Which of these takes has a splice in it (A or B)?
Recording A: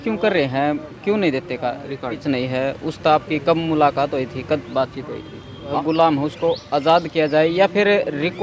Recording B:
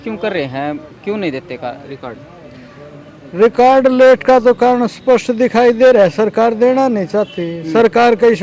A